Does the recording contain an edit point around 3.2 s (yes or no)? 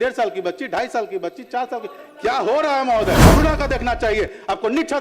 yes